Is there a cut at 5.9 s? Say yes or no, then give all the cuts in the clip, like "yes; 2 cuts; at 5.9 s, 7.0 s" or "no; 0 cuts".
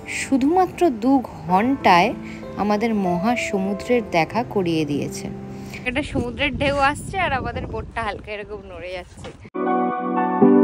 yes; 1 cut; at 5.9 s